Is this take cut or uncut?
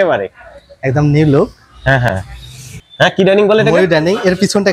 cut